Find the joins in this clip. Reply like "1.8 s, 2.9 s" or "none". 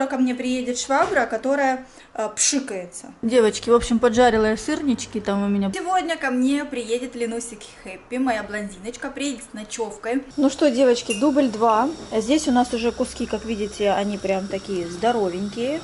3.0 s, 5.7 s, 10.3 s